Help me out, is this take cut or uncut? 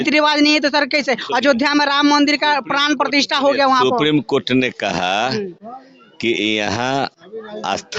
uncut